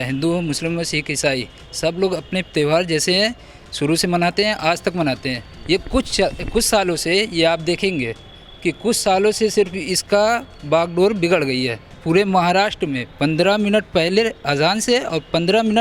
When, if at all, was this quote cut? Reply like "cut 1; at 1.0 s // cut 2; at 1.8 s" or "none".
cut 1; at 11.9 s